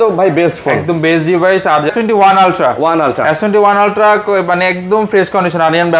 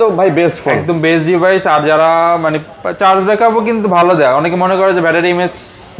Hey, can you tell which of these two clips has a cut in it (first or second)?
first